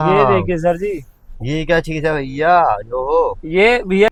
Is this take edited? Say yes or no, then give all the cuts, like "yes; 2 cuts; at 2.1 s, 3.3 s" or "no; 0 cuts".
no; 0 cuts